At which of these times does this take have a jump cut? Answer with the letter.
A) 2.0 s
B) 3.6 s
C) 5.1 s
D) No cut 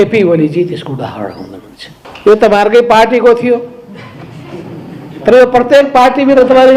A